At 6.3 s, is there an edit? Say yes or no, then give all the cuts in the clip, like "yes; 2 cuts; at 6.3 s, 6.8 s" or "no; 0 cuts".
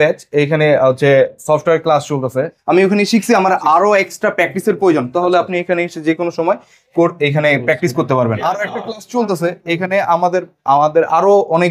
no; 2 cuts; at 2.6 s, 8.4 s